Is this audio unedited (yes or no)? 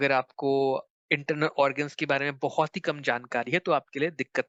yes